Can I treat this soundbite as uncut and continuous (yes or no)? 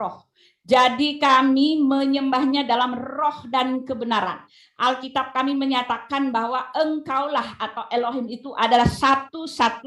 yes